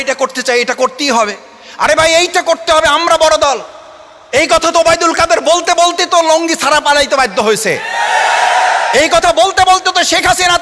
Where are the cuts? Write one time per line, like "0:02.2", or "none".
none